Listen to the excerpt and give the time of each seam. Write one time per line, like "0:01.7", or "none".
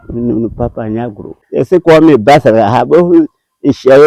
0:01.4